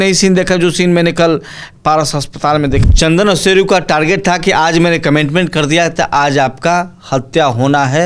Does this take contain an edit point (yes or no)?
yes